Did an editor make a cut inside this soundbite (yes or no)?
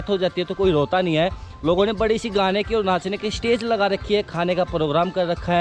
no